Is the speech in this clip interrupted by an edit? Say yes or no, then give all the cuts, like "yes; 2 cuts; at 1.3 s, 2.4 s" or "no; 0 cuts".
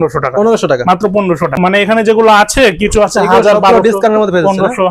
yes; 1 cut; at 1.6 s